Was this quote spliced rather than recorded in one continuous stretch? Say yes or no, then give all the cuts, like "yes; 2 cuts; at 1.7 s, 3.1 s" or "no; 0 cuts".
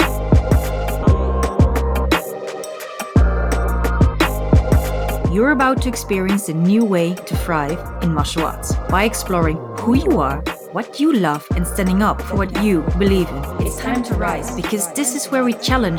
yes; 1 cut; at 1.0 s